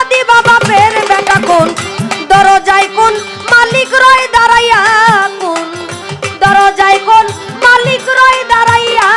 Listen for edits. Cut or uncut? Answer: uncut